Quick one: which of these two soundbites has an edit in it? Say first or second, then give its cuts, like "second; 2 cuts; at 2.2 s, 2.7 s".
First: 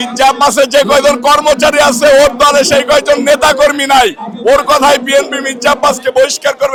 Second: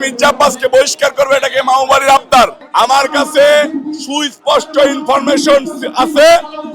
second; 1 cut; at 2.6 s